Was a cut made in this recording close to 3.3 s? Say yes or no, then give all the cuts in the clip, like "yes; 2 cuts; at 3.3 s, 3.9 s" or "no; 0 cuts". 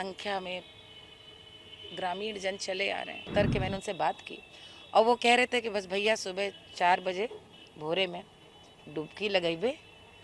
yes; 1 cut; at 3.3 s